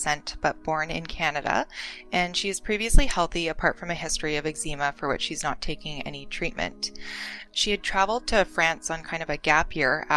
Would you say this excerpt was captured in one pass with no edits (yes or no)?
no